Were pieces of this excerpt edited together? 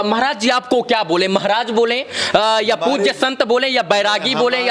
no; 0 cuts

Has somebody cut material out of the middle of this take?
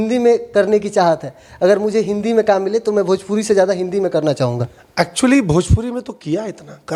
no; 0 cuts

